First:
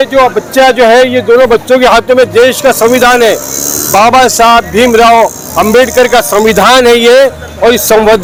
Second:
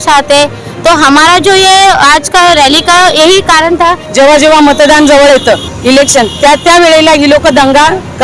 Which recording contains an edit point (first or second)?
second